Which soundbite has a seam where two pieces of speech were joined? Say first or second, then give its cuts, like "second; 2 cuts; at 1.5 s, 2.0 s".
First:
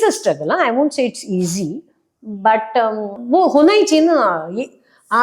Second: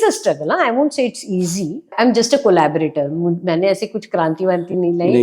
second; 1 cut; at 1.9 s